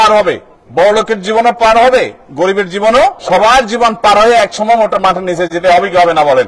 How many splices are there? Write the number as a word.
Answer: one